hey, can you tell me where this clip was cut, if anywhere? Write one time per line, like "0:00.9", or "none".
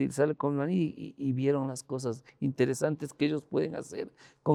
none